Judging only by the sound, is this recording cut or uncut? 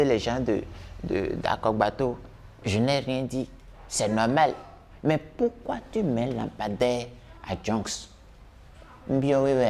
uncut